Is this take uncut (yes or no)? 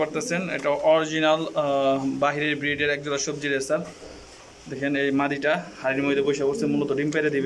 yes